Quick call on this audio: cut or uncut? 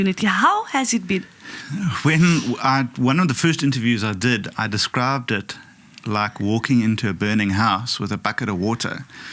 uncut